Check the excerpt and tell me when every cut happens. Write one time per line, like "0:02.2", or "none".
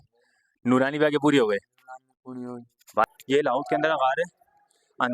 0:03.0